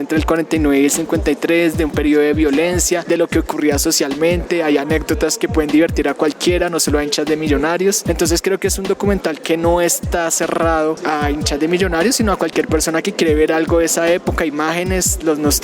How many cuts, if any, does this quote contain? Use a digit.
3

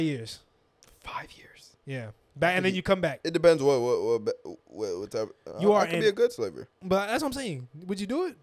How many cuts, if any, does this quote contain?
1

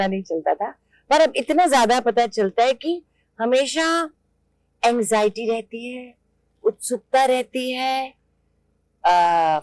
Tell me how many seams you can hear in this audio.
0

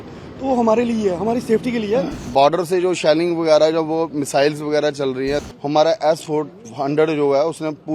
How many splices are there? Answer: 2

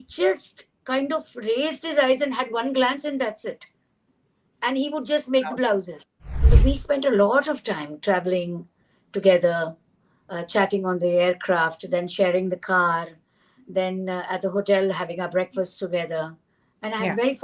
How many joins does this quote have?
1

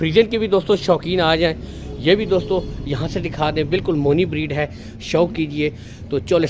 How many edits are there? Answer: 0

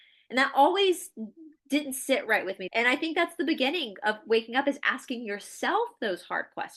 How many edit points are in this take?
1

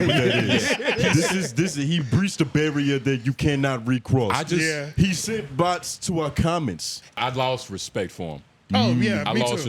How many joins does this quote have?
1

